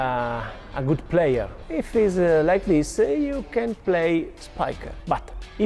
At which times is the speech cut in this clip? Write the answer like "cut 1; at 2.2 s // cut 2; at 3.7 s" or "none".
cut 1; at 1.6 s // cut 2; at 3.8 s // cut 3; at 4.6 s